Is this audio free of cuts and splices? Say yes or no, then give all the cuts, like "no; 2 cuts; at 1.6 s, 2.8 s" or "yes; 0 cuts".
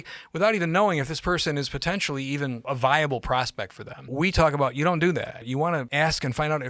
no; 3 cuts; at 2.6 s, 4.1 s, 5.5 s